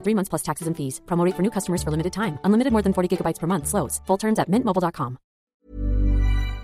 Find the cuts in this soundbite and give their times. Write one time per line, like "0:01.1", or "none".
0:05.5